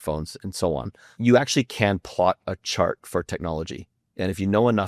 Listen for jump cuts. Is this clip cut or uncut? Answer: cut